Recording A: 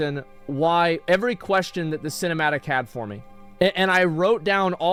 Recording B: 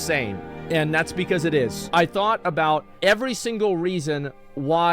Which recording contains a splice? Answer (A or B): B